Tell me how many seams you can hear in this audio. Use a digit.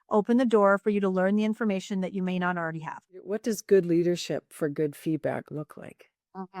1